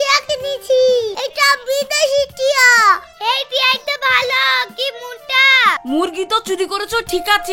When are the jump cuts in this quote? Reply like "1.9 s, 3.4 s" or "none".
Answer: 1.2 s, 5.8 s